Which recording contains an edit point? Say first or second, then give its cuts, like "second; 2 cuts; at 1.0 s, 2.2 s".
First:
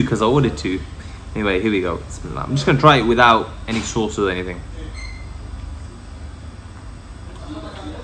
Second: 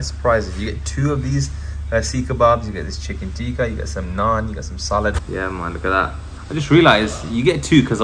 second; 1 cut; at 5.2 s